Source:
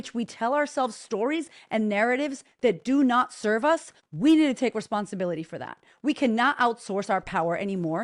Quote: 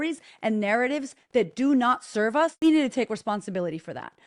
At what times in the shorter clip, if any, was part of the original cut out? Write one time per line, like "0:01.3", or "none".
0:02.6